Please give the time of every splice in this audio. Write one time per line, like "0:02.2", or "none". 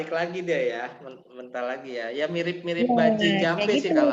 none